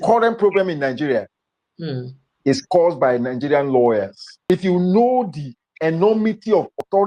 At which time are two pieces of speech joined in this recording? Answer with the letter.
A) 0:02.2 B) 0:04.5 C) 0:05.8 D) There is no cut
B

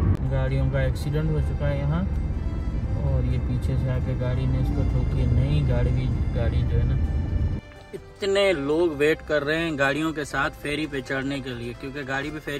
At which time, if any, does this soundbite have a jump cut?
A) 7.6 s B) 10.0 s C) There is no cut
A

